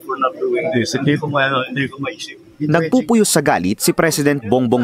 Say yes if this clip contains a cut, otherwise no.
no